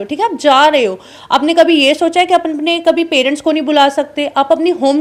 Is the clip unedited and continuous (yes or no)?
yes